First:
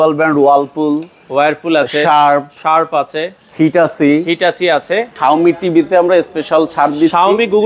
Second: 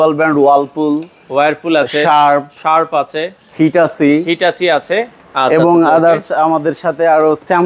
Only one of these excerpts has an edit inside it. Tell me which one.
first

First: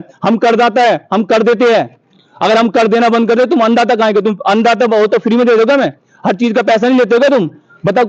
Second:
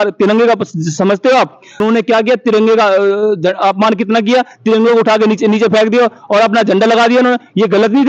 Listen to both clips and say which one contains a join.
second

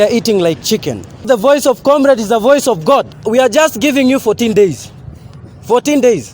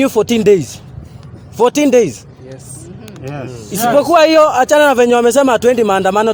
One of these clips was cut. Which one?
first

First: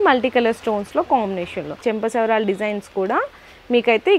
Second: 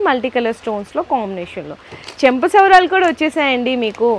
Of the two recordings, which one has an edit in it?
first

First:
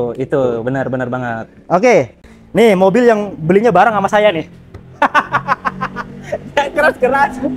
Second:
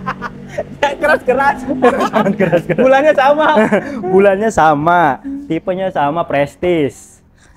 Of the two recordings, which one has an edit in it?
first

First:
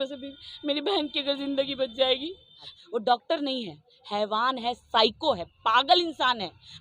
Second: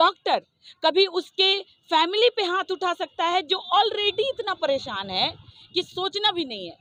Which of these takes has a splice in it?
first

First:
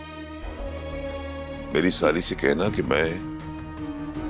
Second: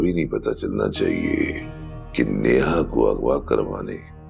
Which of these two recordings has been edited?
first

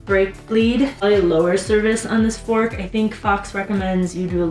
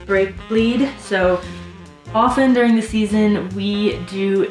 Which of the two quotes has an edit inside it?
first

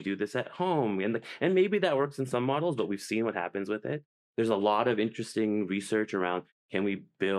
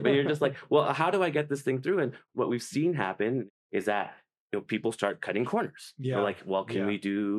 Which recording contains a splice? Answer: second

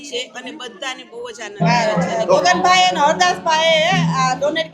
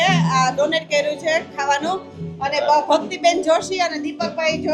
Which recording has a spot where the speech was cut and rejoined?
first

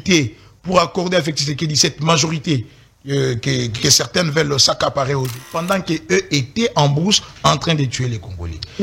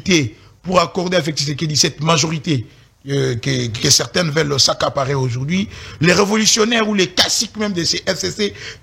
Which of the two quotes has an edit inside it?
first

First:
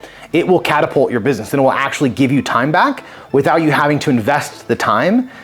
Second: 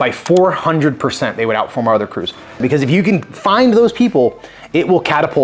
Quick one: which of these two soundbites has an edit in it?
second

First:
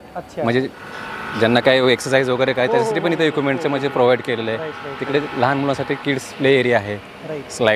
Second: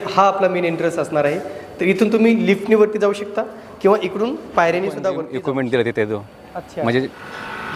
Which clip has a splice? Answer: second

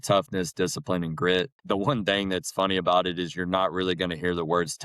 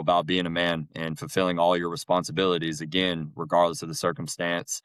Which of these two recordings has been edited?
first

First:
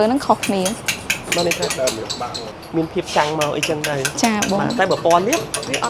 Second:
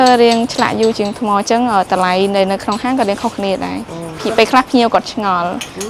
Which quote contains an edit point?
first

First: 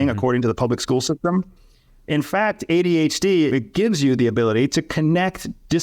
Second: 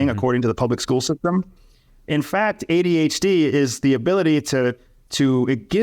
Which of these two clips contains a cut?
first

